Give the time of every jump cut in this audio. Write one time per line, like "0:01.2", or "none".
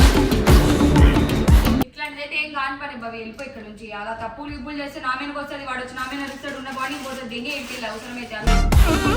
0:01.9